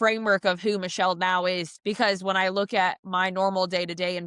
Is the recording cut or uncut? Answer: cut